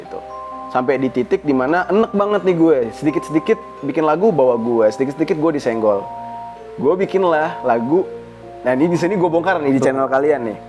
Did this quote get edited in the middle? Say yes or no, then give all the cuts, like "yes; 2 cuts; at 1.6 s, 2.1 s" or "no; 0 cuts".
no; 0 cuts